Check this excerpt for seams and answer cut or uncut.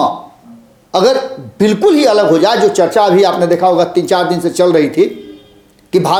uncut